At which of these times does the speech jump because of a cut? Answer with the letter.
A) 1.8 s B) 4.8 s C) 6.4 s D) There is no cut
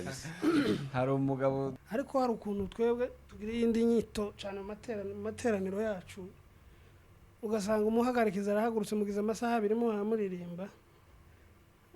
A